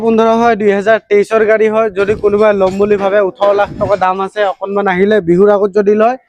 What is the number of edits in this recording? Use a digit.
0